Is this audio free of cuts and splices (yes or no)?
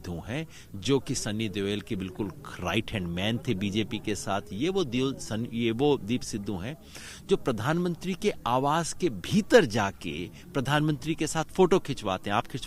yes